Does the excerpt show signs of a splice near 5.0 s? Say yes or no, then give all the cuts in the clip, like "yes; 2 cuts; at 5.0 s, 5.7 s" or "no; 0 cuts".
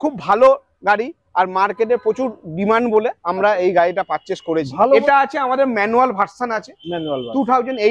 yes; 1 cut; at 5.0 s